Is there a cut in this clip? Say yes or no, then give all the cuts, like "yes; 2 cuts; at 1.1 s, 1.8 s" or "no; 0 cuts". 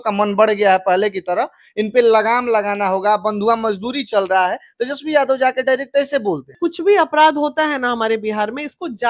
yes; 1 cut; at 6.5 s